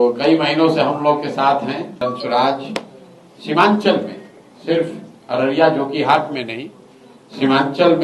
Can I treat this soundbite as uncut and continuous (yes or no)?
no